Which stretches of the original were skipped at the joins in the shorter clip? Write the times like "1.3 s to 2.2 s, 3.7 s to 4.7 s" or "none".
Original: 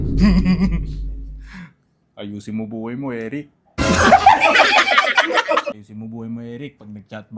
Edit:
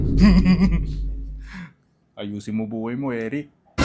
none